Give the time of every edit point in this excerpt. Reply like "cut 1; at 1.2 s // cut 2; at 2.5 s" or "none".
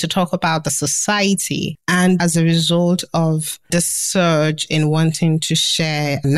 cut 1; at 2.2 s